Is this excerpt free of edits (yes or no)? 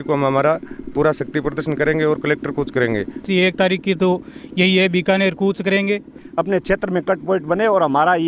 no